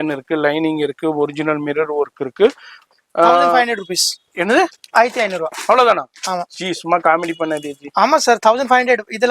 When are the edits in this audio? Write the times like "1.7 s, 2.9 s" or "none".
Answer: 2.8 s